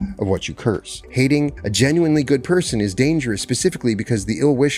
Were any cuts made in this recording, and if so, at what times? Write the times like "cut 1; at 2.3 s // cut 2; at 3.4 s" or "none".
cut 1; at 1.0 s // cut 2; at 1.6 s